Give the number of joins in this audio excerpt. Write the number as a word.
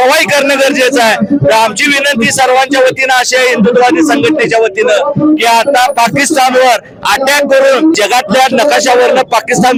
zero